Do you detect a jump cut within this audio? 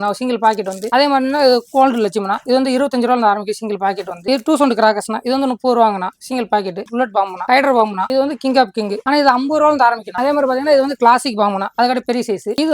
yes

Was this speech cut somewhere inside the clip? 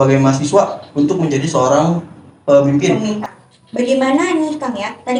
yes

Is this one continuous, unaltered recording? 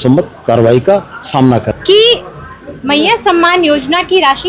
no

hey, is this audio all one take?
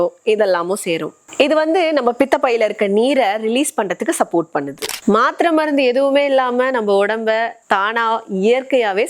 no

